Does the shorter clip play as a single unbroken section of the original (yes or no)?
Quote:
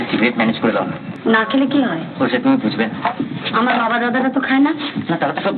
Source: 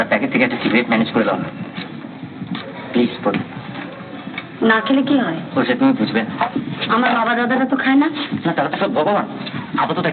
no